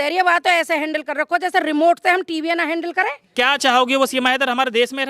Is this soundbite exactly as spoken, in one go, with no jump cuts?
no; 1 cut; at 3.2 s

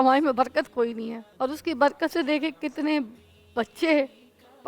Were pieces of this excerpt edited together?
yes; 1 cut; at 1.2 s

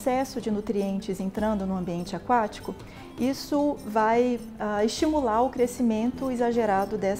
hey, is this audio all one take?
yes; 0 cuts

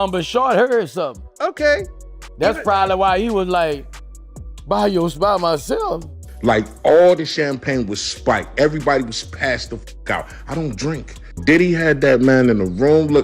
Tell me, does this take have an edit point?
yes; 1 cut; at 6.2 s

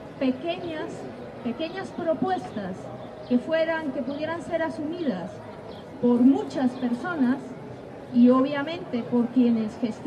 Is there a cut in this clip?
yes; 1 cut; at 3.6 s

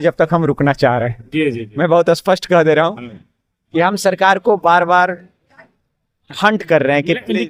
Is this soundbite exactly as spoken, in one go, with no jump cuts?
yes; 0 cuts

